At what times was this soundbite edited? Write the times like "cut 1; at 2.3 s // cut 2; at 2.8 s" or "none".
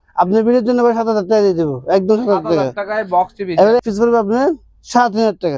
cut 1; at 3.8 s